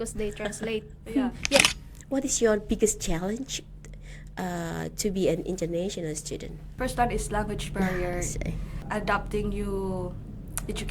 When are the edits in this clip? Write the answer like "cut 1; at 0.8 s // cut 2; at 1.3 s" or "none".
cut 1; at 1.6 s // cut 2; at 6.6 s // cut 3; at 8.7 s